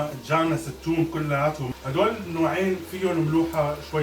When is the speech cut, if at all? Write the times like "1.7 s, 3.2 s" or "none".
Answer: 1.7 s